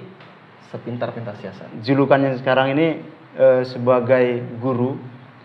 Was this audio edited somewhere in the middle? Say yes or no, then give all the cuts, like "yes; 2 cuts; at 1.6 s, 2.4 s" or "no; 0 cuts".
yes; 1 cut; at 1.7 s